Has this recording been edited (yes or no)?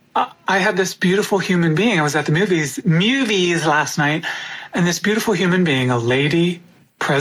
no